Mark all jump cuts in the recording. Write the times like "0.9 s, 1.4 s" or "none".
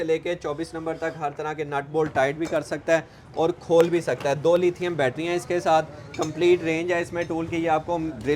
none